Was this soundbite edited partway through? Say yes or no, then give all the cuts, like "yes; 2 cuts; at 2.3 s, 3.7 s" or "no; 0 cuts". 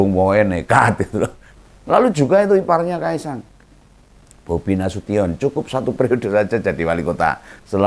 yes; 1 cut; at 1.5 s